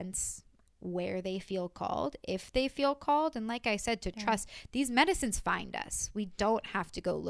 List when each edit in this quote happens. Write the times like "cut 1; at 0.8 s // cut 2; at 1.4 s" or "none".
none

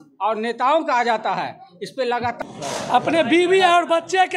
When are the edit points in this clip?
cut 1; at 2.4 s

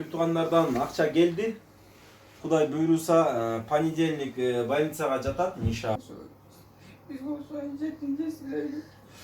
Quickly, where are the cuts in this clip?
cut 1; at 6.0 s

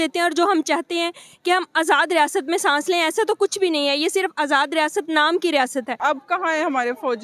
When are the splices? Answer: cut 1; at 5.9 s

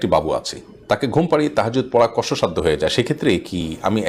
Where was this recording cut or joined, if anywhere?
none

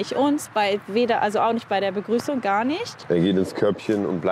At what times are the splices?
none

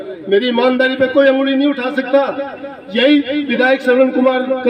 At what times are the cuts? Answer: none

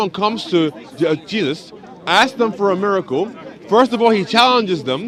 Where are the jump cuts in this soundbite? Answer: none

